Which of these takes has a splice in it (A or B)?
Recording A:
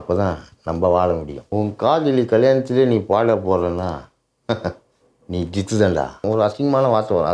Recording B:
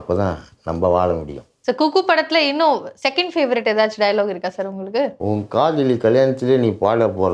A